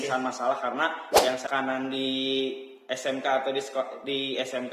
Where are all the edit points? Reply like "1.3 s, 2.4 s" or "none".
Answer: 1.4 s